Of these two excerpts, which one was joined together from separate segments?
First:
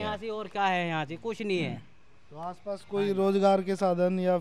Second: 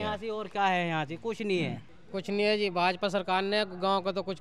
second; 1 cut; at 1.9 s

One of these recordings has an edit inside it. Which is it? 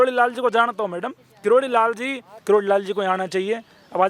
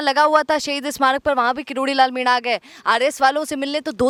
first; 1 cut; at 2.3 s

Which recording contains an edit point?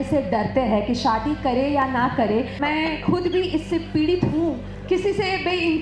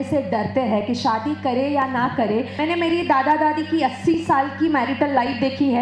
first; 2 cuts; at 2.5 s, 4.7 s

